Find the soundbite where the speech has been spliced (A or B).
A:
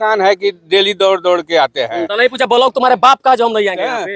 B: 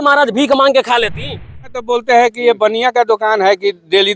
B